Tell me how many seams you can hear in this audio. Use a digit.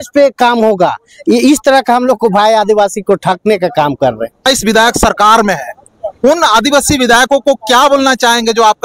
1